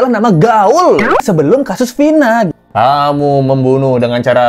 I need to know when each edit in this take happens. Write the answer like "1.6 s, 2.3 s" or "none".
1.2 s, 2.5 s